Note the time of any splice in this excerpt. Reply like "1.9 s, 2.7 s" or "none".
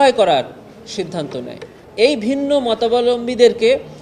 1.8 s

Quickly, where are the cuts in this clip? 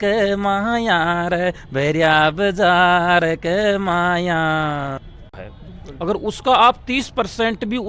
5.5 s

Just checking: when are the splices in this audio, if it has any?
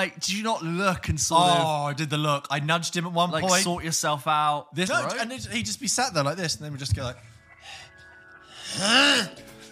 4.9 s

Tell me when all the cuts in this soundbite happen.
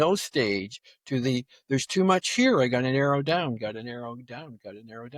none

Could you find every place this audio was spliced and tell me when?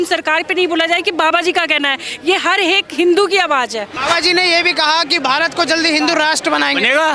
3.9 s

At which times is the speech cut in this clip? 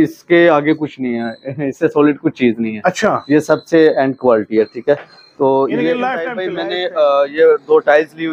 6.5 s

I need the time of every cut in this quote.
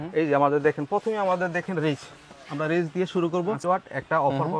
3.6 s

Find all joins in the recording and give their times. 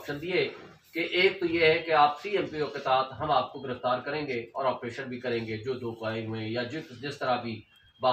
none

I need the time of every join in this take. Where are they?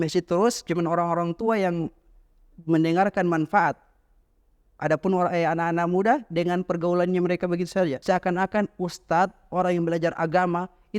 8.0 s

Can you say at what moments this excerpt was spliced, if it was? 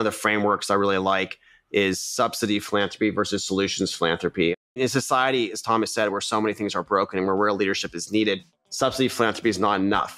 4.7 s

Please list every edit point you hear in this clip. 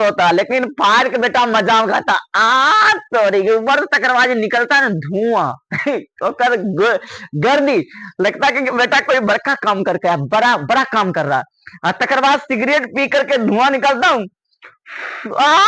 none

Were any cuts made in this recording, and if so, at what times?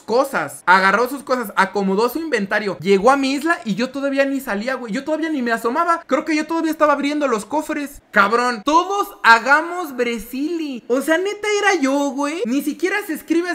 8.6 s

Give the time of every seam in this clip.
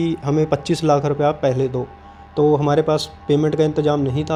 none

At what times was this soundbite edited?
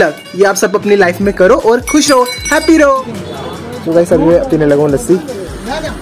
3.0 s

